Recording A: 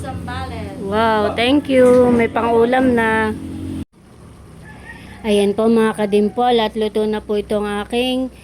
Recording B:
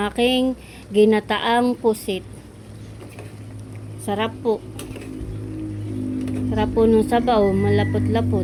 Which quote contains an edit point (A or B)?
A